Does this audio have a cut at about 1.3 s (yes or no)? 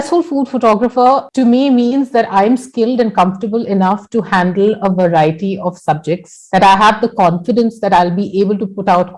yes